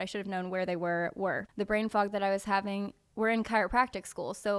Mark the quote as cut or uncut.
cut